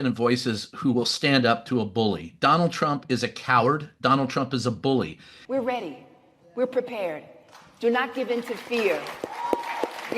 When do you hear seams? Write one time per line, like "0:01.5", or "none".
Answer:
0:05.3